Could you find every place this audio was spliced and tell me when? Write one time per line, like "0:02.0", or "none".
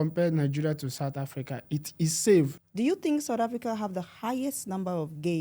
0:02.6